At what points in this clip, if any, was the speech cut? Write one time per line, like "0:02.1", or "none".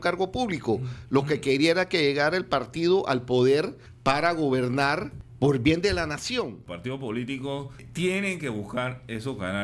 0:03.8
0:05.2
0:06.6
0:07.8